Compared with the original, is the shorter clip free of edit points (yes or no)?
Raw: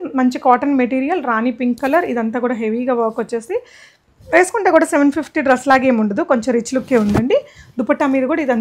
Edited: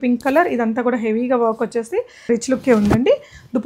no